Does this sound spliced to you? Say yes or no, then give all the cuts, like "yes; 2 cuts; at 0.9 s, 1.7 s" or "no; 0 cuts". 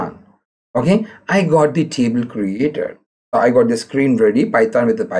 no; 0 cuts